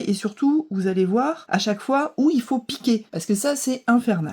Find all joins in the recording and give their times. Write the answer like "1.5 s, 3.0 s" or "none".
1.4 s, 3.1 s